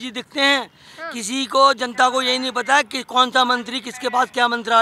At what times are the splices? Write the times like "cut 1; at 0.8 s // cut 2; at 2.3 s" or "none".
none